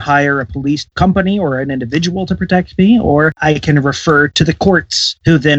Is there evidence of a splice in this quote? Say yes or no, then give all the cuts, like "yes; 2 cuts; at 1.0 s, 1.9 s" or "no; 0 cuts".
yes; 1 cut; at 4.3 s